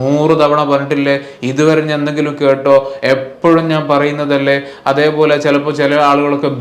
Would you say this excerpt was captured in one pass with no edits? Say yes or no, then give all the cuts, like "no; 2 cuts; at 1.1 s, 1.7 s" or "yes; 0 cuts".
yes; 0 cuts